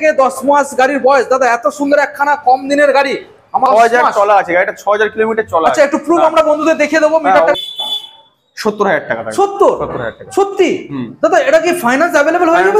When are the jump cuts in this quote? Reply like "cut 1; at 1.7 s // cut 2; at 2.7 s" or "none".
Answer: cut 1; at 3.7 s // cut 2; at 7.5 s